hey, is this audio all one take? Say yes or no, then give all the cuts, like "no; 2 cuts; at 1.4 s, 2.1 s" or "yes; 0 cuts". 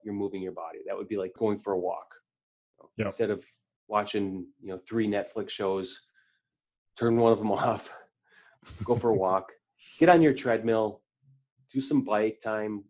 no; 1 cut; at 1.4 s